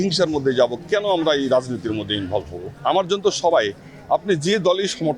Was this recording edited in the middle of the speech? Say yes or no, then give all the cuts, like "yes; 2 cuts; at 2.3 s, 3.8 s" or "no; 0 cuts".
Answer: yes; 1 cut; at 2.6 s